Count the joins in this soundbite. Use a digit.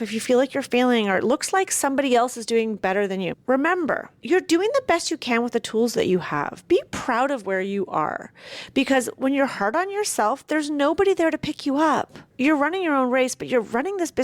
3